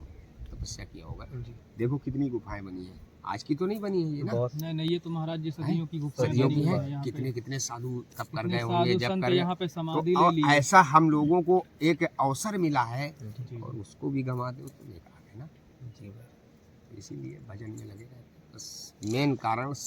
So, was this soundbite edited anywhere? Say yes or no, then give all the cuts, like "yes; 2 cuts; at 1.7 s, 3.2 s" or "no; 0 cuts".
no; 0 cuts